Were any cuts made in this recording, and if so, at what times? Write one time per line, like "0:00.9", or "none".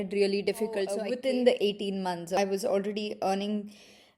0:01.0
0:02.4